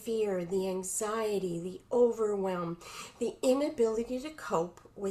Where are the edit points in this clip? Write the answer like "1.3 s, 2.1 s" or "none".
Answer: none

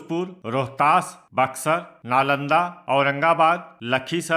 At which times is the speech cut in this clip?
1.9 s

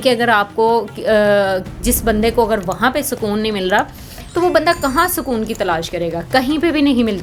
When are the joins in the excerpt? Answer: none

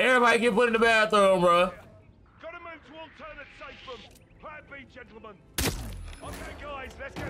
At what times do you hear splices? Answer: 1.9 s

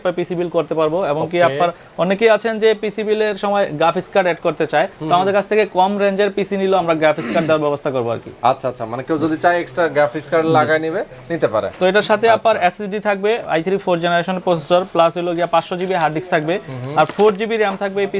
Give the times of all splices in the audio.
none

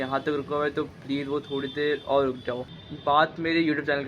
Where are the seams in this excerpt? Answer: 2.7 s

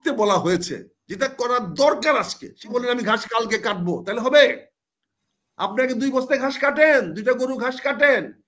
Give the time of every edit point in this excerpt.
2.6 s

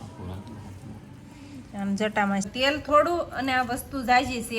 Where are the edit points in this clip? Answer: 2.5 s

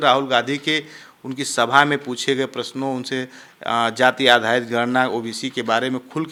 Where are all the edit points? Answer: none

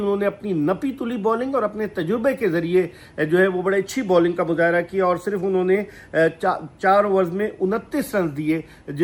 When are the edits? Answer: none

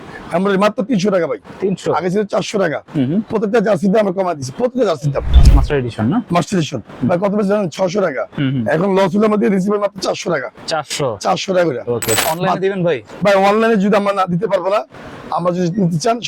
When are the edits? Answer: 5.3 s, 12.2 s

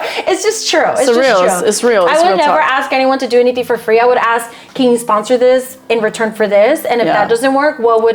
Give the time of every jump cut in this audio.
none

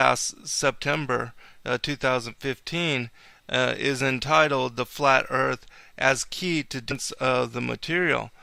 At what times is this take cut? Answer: none

